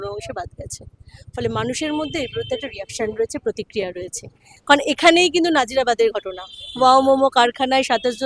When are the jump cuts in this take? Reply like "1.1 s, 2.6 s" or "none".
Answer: 4.5 s